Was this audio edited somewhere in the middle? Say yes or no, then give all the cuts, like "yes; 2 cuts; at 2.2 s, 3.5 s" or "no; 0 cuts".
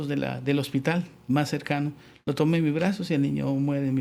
no; 0 cuts